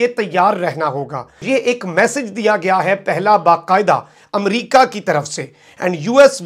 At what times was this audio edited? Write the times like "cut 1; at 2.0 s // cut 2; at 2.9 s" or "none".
cut 1; at 1.4 s